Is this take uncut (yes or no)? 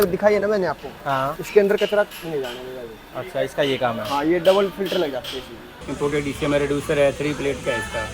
no